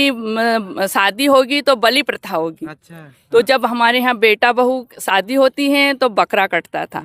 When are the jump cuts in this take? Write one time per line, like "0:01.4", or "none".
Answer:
none